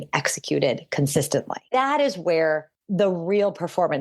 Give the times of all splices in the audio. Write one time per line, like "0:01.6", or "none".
0:02.8